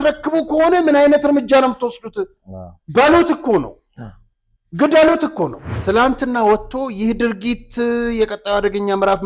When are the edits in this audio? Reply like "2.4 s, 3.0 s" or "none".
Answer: 5.7 s